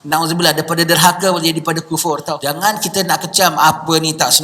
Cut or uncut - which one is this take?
cut